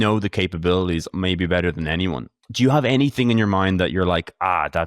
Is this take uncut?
no; 1 cut; at 2.4 s

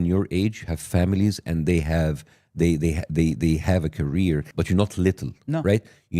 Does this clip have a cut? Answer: yes; 1 cut; at 4.5 s

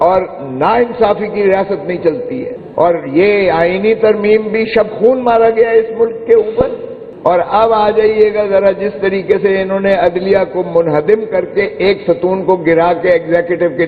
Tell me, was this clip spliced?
yes; 1 cut; at 2.5 s

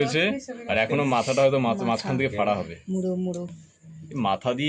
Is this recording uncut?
yes; 0 cuts

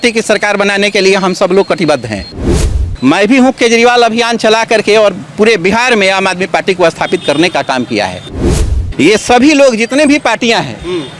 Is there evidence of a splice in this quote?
yes; 2 cuts; at 2.6 s, 8.6 s

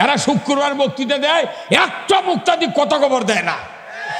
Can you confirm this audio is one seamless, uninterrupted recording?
yes; 0 cuts

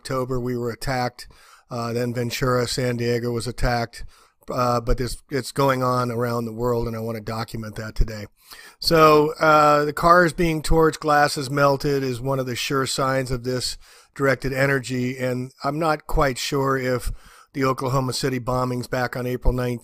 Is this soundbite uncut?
yes; 0 cuts

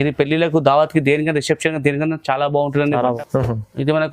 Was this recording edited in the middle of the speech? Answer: yes; 1 cut; at 3.2 s

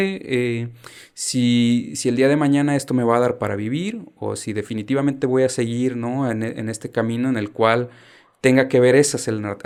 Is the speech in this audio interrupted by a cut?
no; 0 cuts

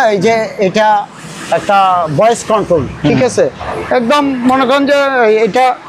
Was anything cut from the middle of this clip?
no; 0 cuts

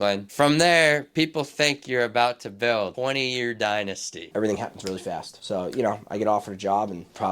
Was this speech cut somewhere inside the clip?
yes; 1 cut; at 4.2 s

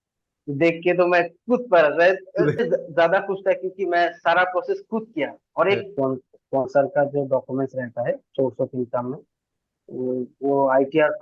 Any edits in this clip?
yes; 2 cuts; at 2.6 s, 5.9 s

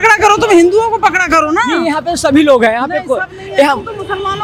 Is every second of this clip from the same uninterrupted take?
yes; 0 cuts

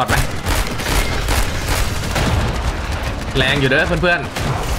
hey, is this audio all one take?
yes; 0 cuts

